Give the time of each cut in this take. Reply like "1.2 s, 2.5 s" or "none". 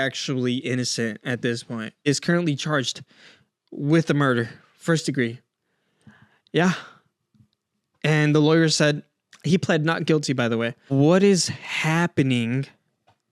2.1 s, 10.9 s